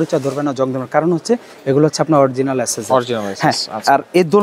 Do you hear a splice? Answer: no; 0 cuts

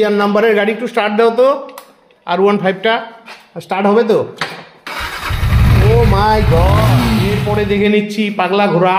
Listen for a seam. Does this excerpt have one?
yes; 1 cut; at 7.4 s

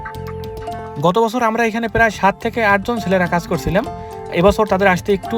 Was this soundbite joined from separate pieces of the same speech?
no; 0 cuts

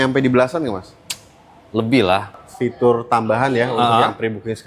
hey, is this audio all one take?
no; 1 cut; at 2.4 s

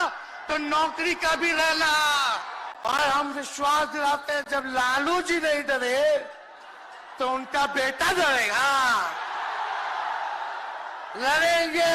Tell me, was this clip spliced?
yes; 1 cut; at 2.6 s

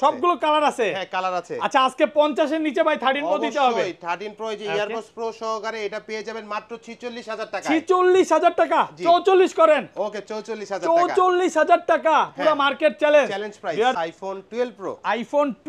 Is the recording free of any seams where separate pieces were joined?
no; 1 cut; at 14.0 s

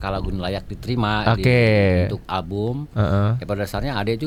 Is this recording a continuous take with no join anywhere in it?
yes; 0 cuts

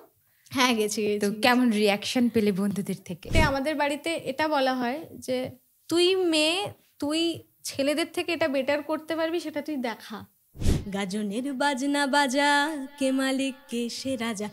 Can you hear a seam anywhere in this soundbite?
yes; 2 cuts; at 3.3 s, 10.6 s

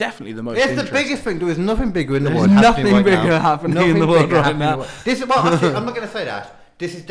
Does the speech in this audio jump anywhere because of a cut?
no; 0 cuts

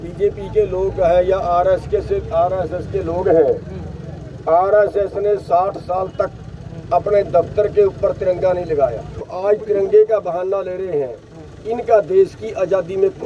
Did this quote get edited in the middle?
yes; 1 cut; at 9.3 s

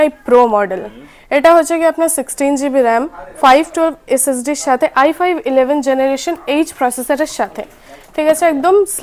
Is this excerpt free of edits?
yes; 0 cuts

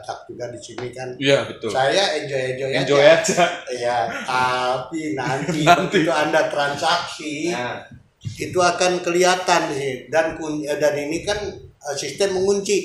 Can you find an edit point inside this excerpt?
no; 0 cuts

